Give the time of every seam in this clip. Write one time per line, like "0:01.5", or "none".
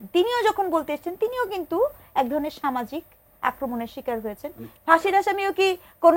0:04.7